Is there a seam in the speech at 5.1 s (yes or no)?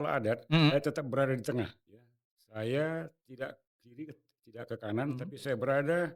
no